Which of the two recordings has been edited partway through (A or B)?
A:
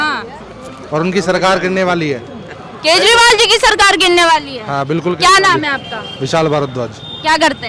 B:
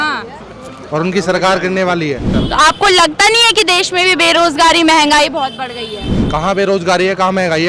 B